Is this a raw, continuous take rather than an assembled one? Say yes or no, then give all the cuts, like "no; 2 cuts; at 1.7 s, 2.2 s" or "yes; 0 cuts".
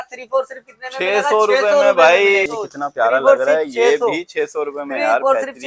no; 1 cut; at 2.4 s